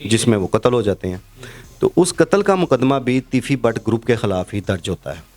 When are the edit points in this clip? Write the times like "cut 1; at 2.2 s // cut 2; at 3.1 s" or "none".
none